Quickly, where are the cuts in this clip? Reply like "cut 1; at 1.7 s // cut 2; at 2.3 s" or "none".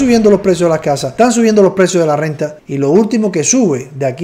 cut 1; at 1.1 s